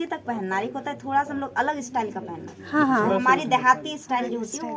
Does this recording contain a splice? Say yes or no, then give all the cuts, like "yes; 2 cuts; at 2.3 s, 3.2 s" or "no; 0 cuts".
no; 0 cuts